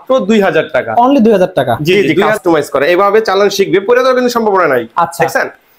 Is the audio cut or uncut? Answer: cut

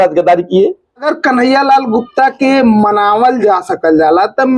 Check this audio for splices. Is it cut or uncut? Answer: cut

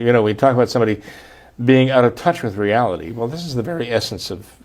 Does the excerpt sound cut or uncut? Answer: uncut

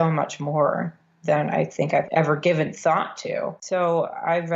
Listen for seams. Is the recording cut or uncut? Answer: cut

